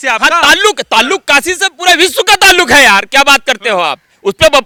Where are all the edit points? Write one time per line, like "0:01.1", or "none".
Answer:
none